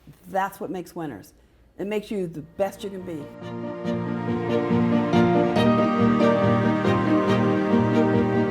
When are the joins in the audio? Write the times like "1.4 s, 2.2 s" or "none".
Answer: 3.3 s